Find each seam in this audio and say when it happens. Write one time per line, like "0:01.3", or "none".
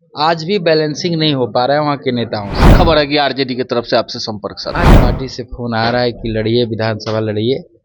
0:02.7
0:04.9